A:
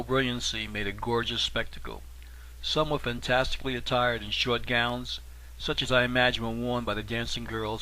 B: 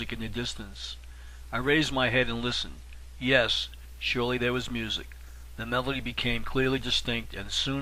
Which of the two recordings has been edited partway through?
A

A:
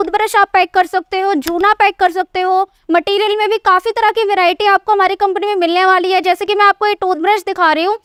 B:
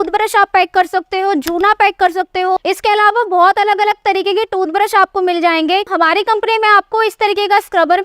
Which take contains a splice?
B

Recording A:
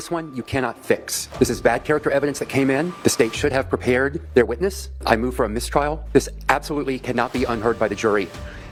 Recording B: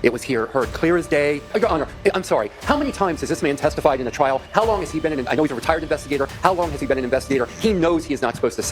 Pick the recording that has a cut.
B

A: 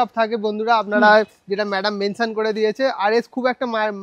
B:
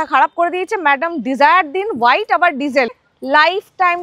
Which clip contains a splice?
B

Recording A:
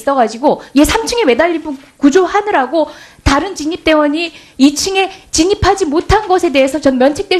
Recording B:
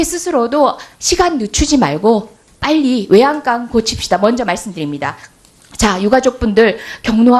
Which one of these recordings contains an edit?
B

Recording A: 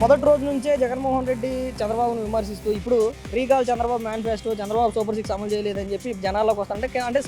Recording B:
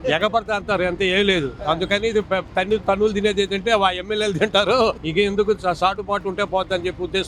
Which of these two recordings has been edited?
B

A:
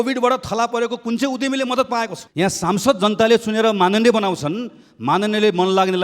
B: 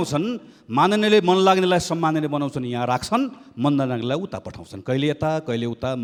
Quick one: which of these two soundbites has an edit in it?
A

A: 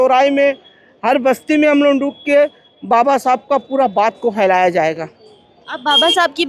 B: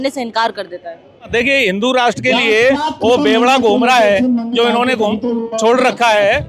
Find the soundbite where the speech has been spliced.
B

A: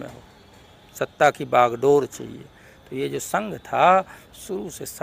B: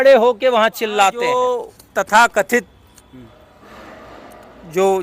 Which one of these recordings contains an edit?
B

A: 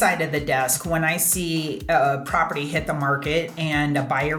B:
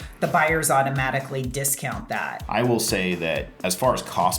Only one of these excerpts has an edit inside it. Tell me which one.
B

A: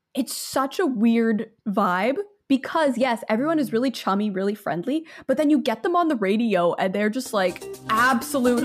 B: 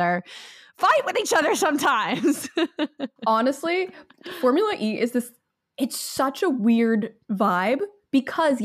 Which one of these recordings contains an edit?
A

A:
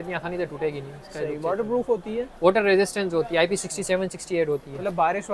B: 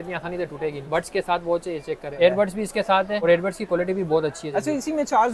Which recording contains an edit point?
B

